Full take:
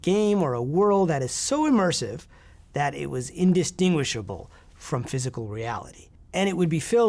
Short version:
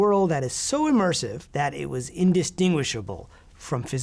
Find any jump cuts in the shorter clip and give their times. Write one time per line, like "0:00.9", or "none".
0:01.4